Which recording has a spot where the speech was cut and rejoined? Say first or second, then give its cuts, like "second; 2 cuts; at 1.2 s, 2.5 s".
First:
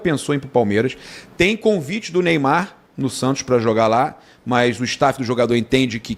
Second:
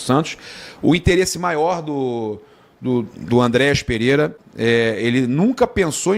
second; 1 cut; at 4.4 s